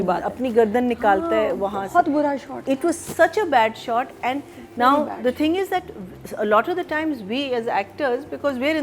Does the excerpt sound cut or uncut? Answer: uncut